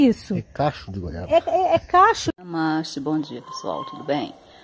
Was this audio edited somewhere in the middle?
no; 0 cuts

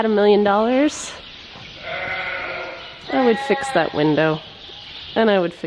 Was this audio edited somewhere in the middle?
no; 0 cuts

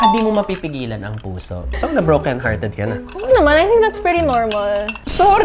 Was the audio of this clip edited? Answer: no; 0 cuts

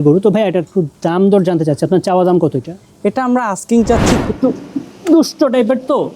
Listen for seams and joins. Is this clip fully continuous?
no; 1 cut; at 4.2 s

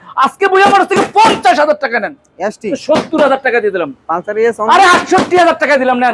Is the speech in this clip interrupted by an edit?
yes; 1 cut; at 2.8 s

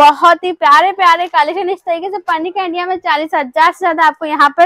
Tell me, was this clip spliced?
no; 0 cuts

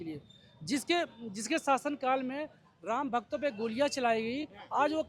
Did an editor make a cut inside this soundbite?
no; 0 cuts

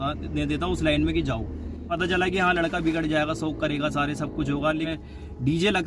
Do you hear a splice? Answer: yes; 2 cuts; at 1.8 s, 4.9 s

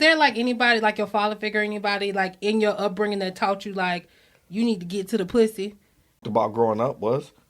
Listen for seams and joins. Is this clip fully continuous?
no; 1 cut; at 6.2 s

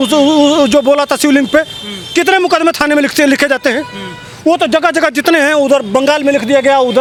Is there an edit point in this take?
no; 0 cuts

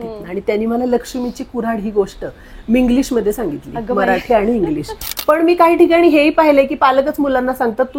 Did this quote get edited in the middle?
yes; 1 cut; at 5.1 s

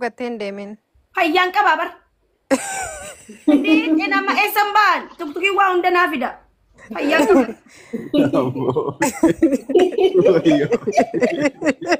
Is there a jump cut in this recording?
no; 0 cuts

